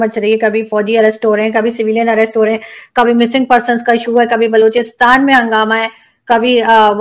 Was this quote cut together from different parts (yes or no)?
no